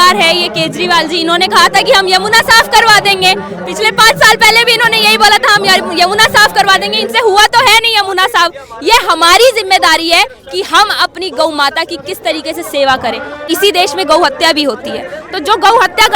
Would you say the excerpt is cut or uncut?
cut